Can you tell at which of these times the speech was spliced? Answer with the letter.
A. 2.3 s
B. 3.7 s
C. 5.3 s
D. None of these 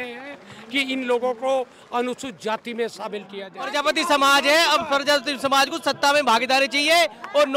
B